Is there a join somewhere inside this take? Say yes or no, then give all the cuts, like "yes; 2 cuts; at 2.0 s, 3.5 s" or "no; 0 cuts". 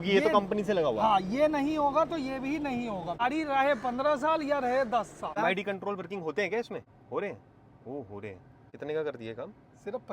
yes; 4 cuts; at 3.2 s, 5.4 s, 6.9 s, 8.7 s